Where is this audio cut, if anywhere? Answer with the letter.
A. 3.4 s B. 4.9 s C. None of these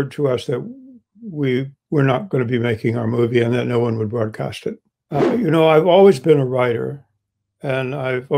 B